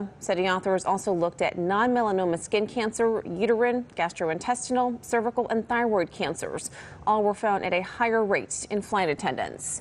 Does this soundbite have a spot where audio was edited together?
yes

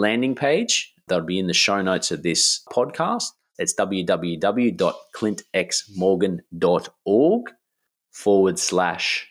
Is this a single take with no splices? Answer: no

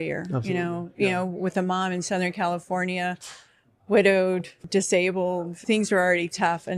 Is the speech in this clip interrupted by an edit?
yes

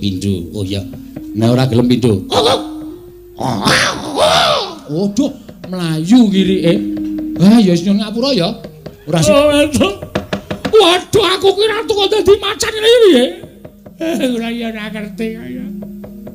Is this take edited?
yes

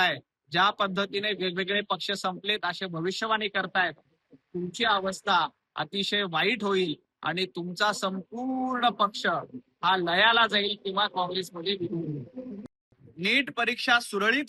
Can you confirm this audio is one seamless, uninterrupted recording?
no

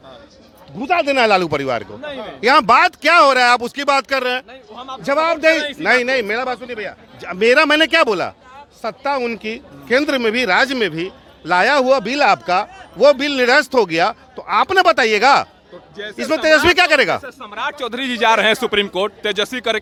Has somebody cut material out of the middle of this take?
no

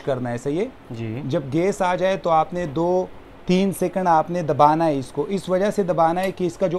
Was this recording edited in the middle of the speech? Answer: no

